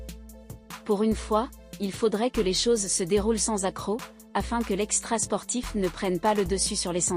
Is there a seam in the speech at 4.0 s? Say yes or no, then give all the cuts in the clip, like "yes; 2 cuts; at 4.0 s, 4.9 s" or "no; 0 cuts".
no; 0 cuts